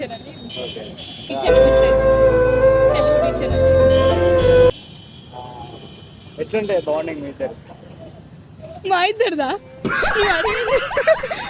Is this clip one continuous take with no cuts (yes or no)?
yes